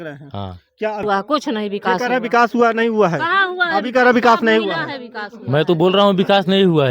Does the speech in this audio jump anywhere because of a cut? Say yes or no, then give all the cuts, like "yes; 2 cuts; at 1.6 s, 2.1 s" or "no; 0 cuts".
yes; 1 cut; at 1.0 s